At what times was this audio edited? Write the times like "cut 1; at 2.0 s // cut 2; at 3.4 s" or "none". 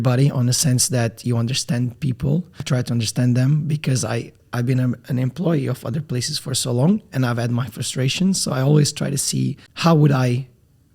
cut 1; at 2.6 s // cut 2; at 4.4 s // cut 3; at 9.7 s